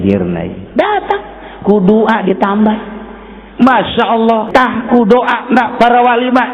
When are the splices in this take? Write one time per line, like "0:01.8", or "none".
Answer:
0:04.5